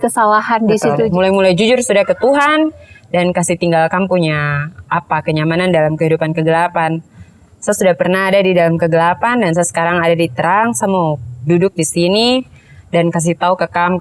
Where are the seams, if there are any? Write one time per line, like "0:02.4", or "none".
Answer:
0:01.1

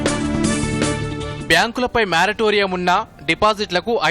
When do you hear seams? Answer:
0:01.3

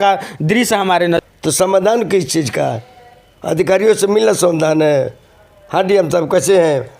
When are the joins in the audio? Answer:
0:01.2

